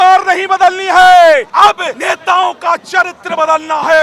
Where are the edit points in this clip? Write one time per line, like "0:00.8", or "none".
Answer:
0:01.6